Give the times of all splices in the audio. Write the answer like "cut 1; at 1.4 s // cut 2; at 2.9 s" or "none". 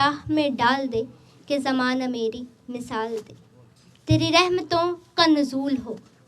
none